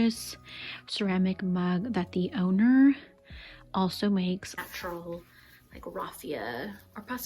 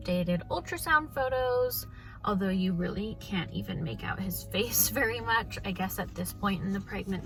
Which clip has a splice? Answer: first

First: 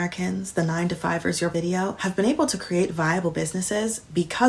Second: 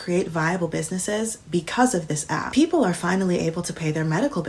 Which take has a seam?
first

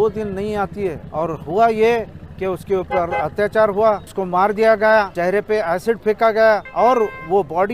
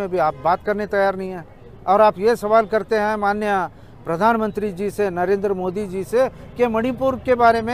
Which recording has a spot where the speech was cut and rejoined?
first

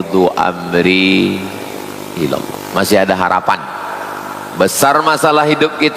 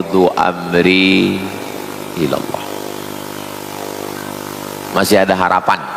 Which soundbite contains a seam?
first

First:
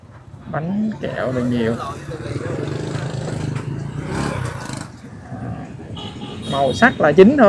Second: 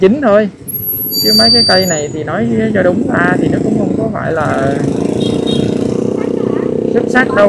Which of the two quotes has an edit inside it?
first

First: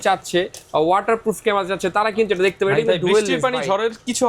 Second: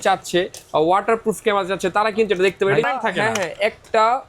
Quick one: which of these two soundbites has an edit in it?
second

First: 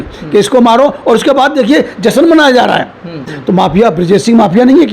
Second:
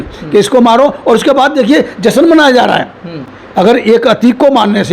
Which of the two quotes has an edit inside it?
first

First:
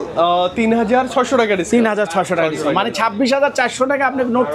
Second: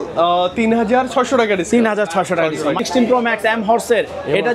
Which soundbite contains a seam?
second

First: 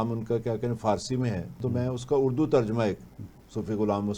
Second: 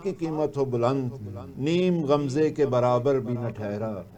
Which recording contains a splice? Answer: first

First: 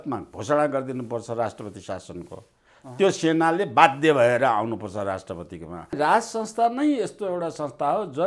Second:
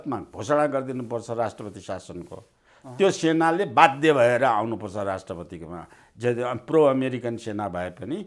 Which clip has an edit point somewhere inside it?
first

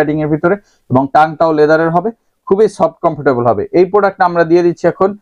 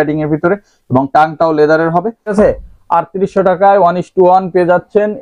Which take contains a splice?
second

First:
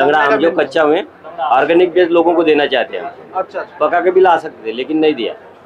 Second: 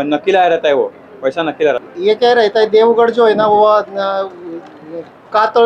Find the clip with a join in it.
second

